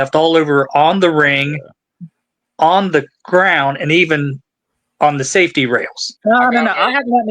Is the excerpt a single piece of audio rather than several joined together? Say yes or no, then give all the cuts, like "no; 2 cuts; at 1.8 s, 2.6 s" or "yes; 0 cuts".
no; 1 cut; at 6.1 s